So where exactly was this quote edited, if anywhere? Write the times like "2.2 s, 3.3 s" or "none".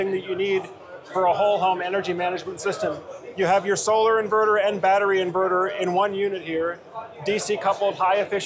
none